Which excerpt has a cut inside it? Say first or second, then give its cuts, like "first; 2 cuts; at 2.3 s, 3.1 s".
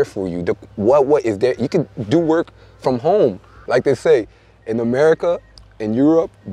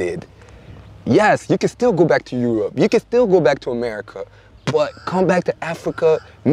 first; 1 cut; at 3.6 s